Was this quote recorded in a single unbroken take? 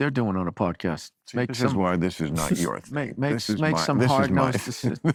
yes; 0 cuts

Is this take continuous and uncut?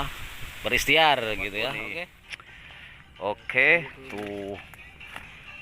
no; 1 cut; at 1.9 s

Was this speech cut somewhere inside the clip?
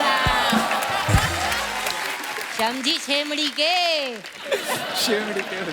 no; 0 cuts

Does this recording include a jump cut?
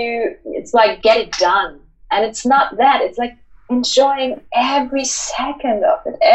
yes; 1 cut; at 1.0 s

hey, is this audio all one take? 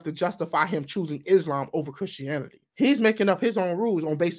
no; 1 cut; at 2.6 s

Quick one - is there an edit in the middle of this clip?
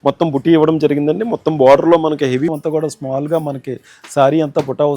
yes; 1 cut; at 2.5 s

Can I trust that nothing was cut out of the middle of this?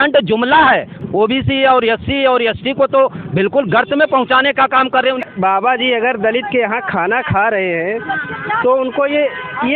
no; 2 cuts; at 1.0 s, 5.3 s

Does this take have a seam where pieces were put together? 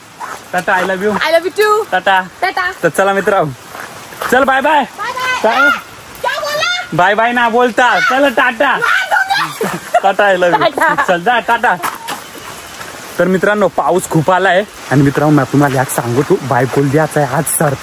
no; 0 cuts

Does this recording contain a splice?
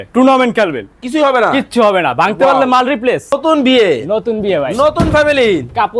yes; 1 cut; at 3.3 s

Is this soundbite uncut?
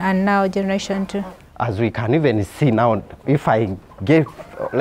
yes; 0 cuts

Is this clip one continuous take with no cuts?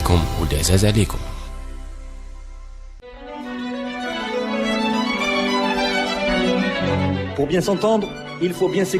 no; 1 cut; at 2.8 s

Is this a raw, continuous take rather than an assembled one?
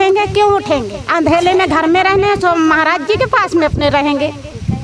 yes; 0 cuts

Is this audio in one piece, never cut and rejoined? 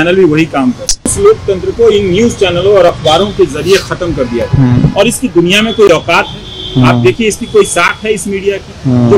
no; 1 cut; at 1.1 s

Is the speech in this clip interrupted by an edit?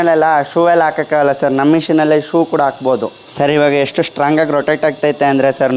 no; 0 cuts

